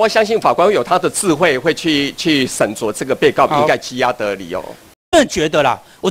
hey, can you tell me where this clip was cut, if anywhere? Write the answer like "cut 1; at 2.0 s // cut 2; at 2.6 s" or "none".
cut 1; at 5.1 s